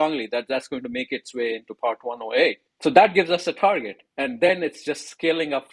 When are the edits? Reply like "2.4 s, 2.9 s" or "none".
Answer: 2.7 s